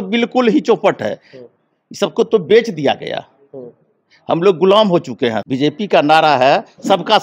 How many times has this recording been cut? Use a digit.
1